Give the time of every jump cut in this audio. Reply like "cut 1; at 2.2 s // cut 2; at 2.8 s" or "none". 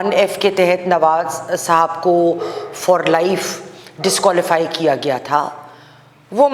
none